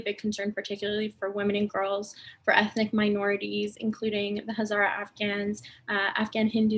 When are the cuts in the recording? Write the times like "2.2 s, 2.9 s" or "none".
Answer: none